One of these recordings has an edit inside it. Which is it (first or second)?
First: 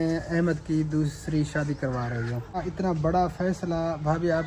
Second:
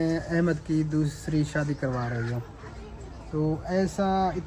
first